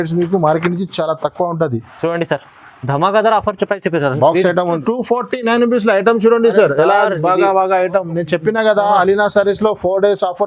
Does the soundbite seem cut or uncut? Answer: cut